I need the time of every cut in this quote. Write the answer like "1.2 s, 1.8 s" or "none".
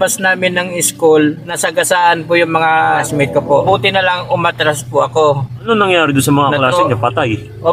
1.6 s, 3.3 s, 5.6 s